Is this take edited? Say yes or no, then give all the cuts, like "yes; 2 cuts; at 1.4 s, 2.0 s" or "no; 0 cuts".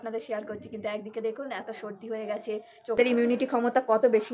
yes; 1 cut; at 3.0 s